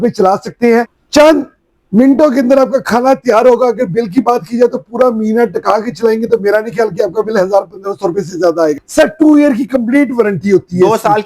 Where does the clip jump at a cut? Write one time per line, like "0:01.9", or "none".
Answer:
0:01.0
0:08.8